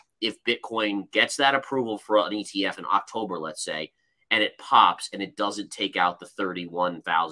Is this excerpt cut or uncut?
uncut